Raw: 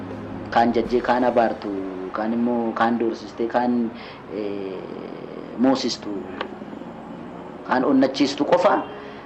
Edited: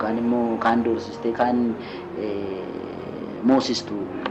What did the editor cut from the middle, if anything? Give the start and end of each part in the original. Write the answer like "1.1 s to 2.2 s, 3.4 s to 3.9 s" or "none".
none